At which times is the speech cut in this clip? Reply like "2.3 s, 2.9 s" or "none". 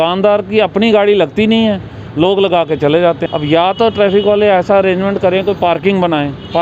3.2 s